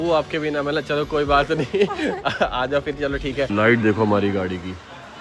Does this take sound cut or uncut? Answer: cut